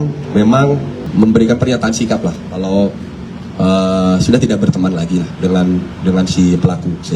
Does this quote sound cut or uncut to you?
cut